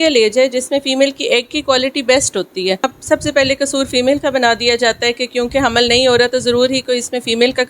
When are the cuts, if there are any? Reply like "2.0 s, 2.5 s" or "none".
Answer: 3.0 s